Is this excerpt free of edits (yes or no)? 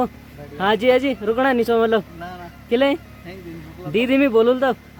yes